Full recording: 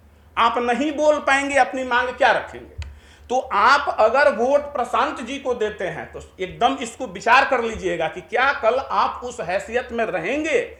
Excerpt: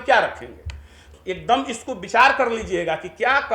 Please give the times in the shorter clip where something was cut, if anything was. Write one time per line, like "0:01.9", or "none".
0:01.0